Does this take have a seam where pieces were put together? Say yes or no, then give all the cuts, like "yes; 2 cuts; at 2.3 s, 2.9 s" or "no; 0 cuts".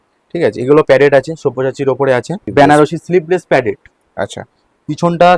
yes; 1 cut; at 2.4 s